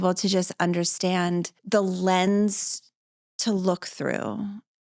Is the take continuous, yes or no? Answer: no